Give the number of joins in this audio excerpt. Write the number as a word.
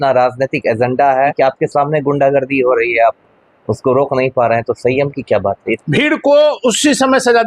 two